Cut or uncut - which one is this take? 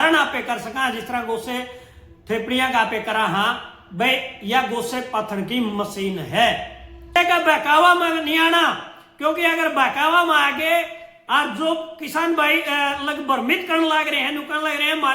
cut